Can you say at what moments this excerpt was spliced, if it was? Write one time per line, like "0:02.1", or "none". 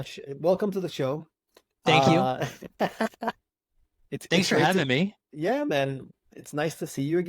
0:06.0